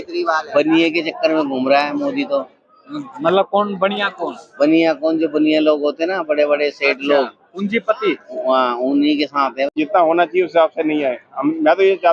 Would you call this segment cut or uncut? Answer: cut